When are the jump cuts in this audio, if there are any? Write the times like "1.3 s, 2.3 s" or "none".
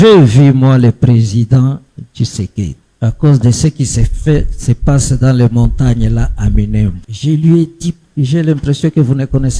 2.8 s, 7.1 s, 8.0 s